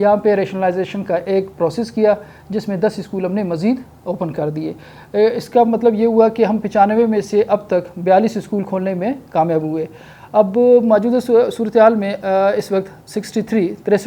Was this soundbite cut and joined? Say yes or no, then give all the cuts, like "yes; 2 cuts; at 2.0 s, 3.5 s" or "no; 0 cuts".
no; 0 cuts